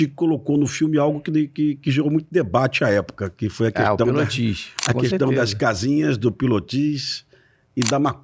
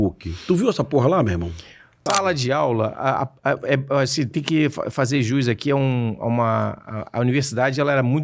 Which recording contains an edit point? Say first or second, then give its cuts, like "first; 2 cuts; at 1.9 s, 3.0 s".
second; 1 cut; at 2.0 s